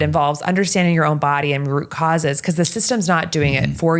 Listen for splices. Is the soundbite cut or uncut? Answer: uncut